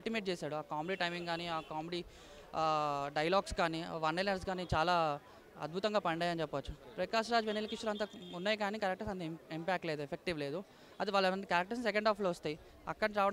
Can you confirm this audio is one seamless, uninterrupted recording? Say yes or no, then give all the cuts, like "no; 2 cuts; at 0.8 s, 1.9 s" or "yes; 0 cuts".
yes; 0 cuts